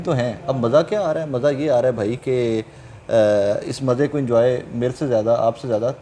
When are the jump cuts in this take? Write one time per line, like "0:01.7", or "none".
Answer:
none

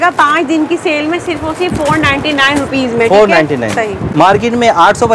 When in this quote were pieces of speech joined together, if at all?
0:04.1

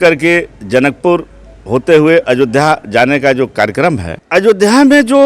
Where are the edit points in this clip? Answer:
0:04.1

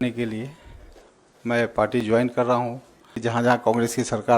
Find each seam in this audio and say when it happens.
0:03.2

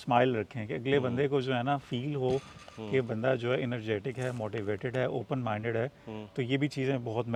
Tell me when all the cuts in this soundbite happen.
none

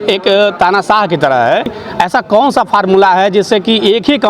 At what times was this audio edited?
0:01.8

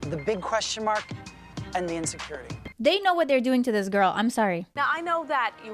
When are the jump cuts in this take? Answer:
0:02.7
0:04.6

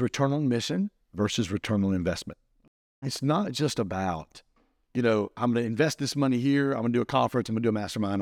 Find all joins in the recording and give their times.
0:03.1

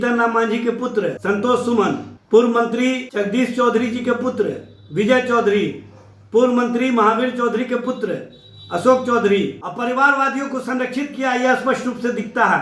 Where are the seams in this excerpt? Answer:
0:01.2
0:02.1
0:03.0
0:09.6

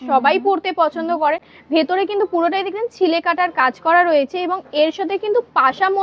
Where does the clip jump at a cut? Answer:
none

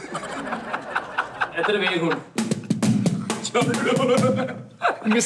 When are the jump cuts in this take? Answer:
none

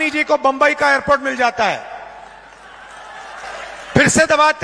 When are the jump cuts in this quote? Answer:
0:03.5

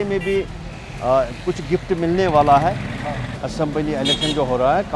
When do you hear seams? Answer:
0:03.3

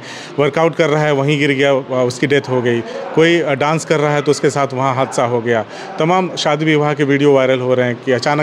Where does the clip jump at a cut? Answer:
none

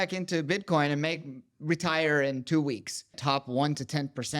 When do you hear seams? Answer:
0:03.2

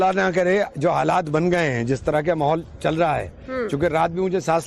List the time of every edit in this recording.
0:02.2

